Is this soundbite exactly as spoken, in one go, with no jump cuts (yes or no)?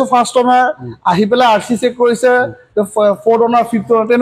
yes